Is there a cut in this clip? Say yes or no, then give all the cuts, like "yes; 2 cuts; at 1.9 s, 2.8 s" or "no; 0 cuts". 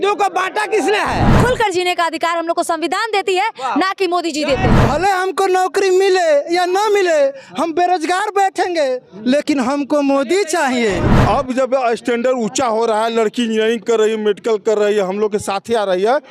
yes; 3 cuts; at 1.3 s, 4.7 s, 11.1 s